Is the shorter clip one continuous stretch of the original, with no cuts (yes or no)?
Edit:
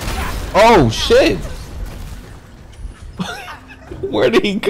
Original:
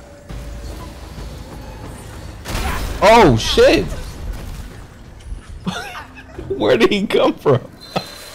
yes